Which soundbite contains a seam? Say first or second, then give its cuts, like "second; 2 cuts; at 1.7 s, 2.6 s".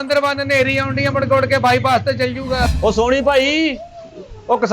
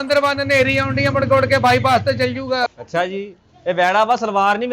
first; 1 cut; at 2.7 s